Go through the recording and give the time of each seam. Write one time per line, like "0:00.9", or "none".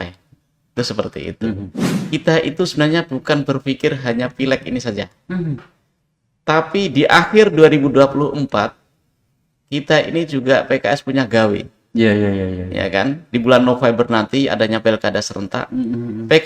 0:01.7